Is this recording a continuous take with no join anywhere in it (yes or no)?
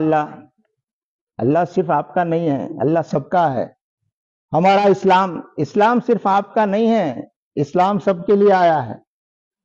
yes